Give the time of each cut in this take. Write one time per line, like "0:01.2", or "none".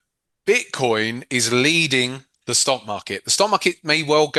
none